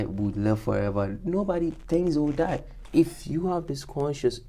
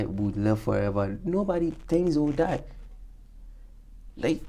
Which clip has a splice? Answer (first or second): first